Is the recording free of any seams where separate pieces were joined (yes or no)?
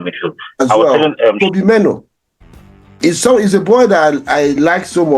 no